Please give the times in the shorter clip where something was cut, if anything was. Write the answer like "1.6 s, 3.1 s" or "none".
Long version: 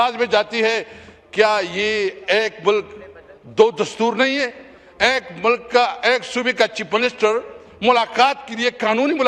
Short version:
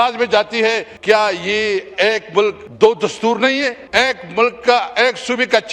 0.9 s, 2.6 s, 3.8 s